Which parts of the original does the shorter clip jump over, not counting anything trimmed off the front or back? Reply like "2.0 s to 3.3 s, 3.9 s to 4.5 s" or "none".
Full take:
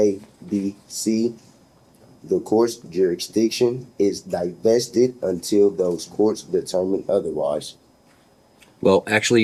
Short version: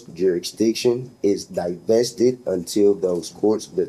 none